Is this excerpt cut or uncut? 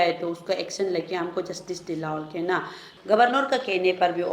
cut